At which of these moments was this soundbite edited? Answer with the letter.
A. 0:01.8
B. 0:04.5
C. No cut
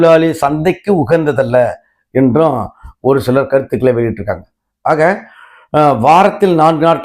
C